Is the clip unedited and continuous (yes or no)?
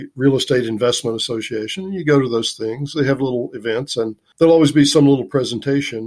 yes